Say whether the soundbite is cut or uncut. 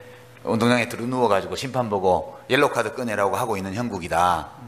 uncut